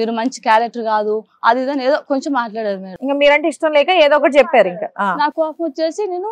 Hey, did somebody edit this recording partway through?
no; 0 cuts

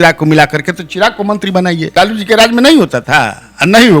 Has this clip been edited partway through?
yes; 1 cut; at 1.9 s

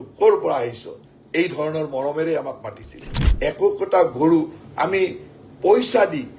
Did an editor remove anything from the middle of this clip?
yes; 1 cut; at 3.3 s

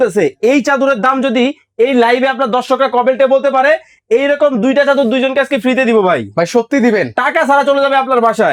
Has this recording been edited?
no; 0 cuts

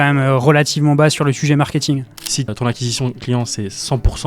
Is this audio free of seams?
no; 1 cut; at 2.1 s

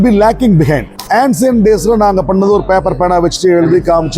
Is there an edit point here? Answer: yes; 1 cut; at 0.9 s

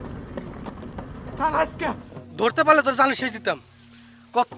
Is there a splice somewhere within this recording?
yes; 1 cut; at 2.1 s

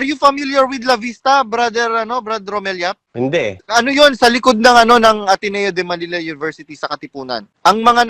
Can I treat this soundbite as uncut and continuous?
no; 1 cut; at 3.4 s

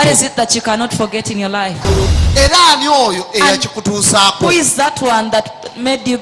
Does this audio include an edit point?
yes; 1 cut; at 1.9 s

